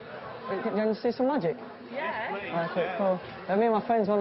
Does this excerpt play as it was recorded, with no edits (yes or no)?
yes